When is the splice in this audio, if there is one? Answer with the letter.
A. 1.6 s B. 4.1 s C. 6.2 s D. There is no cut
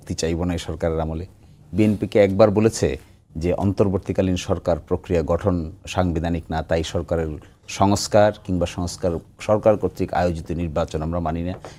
D